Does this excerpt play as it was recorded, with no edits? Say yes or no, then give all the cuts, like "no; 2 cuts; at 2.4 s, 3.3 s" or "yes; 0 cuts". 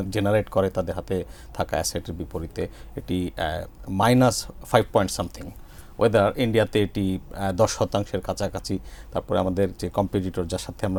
yes; 0 cuts